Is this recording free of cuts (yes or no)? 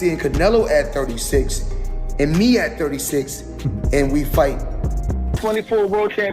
no